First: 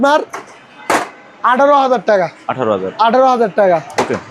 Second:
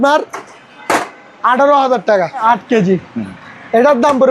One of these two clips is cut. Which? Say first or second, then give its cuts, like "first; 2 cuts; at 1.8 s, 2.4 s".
second; 1 cut; at 2.4 s